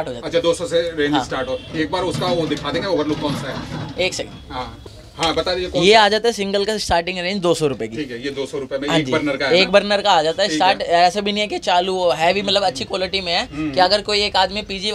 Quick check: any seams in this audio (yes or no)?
no